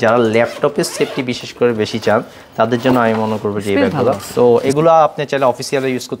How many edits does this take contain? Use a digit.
1